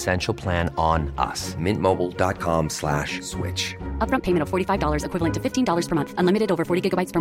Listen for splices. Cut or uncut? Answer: uncut